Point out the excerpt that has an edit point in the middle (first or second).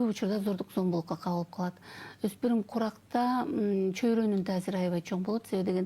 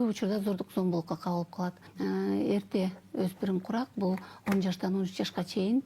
second